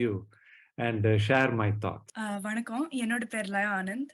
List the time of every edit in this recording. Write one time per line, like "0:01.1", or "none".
0:02.1